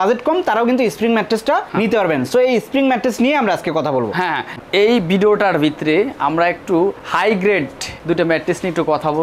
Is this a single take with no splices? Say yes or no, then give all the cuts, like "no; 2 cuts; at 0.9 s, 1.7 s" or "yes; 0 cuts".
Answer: yes; 0 cuts